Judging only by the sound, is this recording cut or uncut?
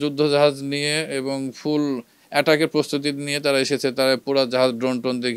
uncut